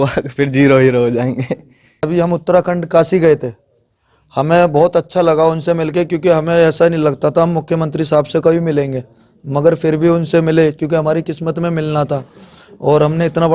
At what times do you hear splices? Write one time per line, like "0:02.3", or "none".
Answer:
0:02.0